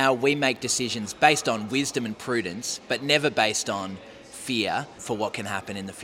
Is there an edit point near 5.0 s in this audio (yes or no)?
yes